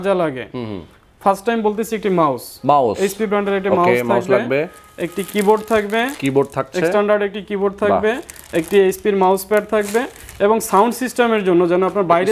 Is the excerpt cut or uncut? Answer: uncut